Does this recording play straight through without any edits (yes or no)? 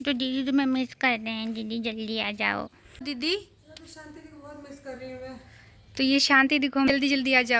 no